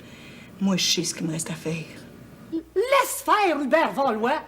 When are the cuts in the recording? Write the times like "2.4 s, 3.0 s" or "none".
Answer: 2.3 s